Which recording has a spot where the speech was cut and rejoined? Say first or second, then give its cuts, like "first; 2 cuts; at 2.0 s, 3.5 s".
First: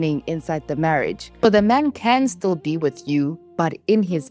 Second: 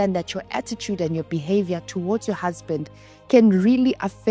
first; 1 cut; at 1.3 s